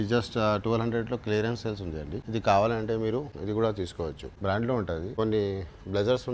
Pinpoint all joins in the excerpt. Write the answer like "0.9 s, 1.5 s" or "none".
2.2 s, 3.3 s, 4.3 s, 5.1 s